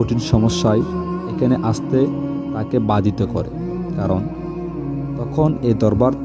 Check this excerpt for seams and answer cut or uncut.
uncut